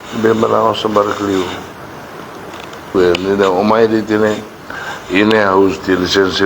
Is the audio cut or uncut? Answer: cut